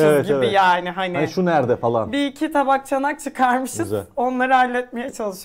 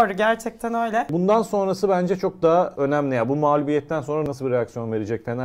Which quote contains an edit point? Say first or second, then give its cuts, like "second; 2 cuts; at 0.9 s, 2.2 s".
second; 3 cuts; at 1.1 s, 2.7 s, 4.2 s